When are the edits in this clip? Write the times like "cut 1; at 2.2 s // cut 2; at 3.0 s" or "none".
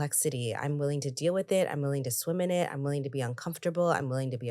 none

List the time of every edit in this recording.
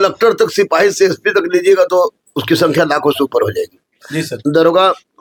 none

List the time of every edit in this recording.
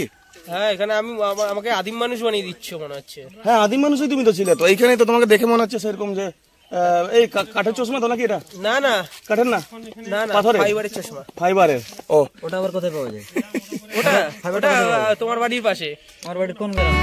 none

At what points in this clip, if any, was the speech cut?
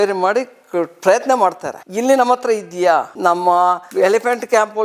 none

